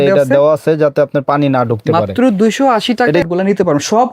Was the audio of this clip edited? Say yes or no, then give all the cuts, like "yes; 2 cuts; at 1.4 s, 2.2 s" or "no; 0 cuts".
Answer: yes; 1 cut; at 3.2 s